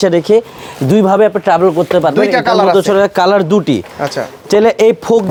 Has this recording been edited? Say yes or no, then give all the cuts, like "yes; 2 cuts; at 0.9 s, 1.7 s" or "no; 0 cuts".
no; 0 cuts